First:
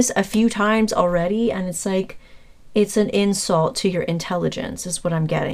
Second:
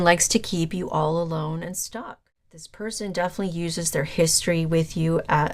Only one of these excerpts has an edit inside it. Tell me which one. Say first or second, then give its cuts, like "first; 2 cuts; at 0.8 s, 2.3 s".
second; 1 cut; at 1.9 s